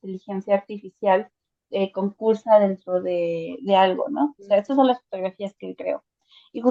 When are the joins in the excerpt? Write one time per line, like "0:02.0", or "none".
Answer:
none